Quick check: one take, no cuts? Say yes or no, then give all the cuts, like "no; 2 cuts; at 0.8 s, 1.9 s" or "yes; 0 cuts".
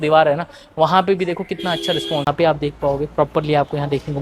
no; 1 cut; at 2.2 s